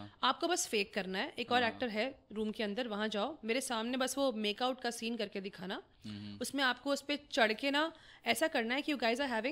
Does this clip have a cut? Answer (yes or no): no